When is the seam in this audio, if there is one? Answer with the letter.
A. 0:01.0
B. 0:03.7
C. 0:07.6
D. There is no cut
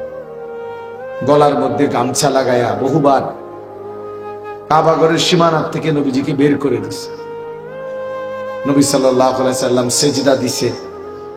A